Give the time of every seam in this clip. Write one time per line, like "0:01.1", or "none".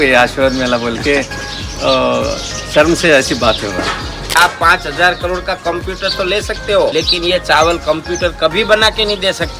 0:04.4
0:06.9